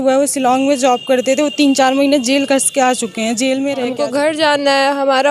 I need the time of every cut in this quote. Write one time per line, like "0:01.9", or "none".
0:03.8